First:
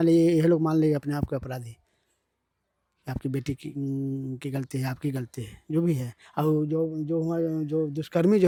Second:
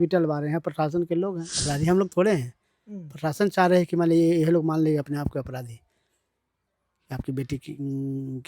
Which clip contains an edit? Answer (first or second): second